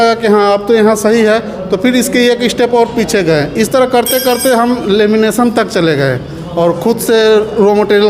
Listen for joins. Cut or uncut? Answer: uncut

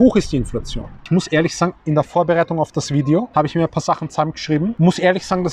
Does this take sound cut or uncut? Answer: cut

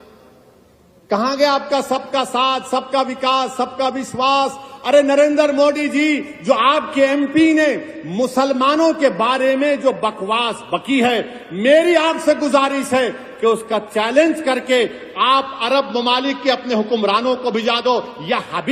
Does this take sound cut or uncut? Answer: uncut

